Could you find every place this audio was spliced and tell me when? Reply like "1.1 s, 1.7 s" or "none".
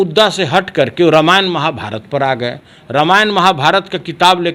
none